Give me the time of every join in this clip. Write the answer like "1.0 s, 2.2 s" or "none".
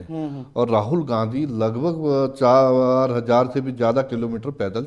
none